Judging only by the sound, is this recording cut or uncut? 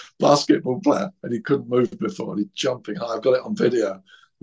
uncut